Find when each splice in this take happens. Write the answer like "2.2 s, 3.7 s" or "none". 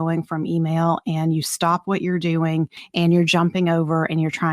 2.8 s